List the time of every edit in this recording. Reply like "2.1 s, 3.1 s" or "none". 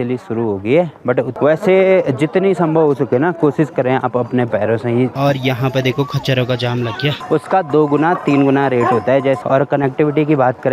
1.3 s, 5.1 s, 7.2 s, 9.4 s